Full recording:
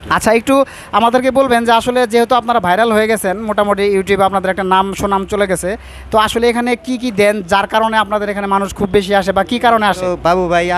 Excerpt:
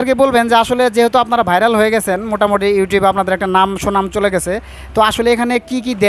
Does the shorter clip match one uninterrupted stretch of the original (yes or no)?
yes